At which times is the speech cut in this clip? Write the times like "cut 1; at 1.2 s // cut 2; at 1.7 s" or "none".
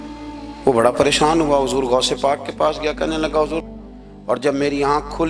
cut 1; at 3.6 s